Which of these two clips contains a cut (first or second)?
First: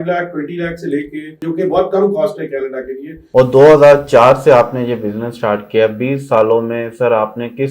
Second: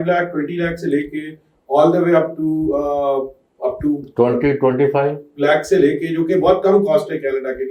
first